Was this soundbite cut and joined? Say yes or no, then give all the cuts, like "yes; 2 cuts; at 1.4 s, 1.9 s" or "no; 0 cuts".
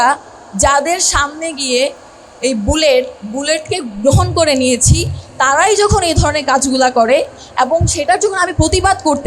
no; 0 cuts